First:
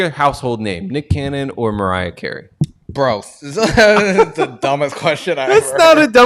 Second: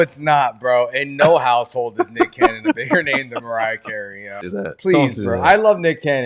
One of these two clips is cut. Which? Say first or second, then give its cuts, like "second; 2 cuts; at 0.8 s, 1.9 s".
second; 1 cut; at 4.4 s